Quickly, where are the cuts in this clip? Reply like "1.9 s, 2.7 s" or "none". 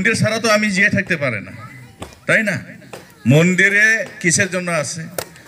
none